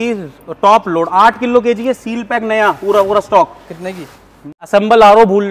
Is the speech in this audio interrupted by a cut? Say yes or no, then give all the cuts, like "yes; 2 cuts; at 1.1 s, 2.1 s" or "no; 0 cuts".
yes; 1 cut; at 4.4 s